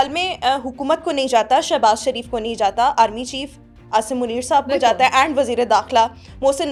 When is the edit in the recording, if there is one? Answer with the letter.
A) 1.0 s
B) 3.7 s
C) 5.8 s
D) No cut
D